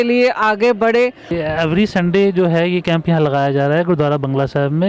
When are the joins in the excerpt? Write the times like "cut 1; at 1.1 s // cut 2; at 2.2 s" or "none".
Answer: cut 1; at 1.3 s